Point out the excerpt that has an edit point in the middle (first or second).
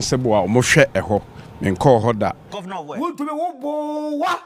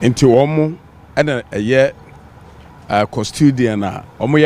first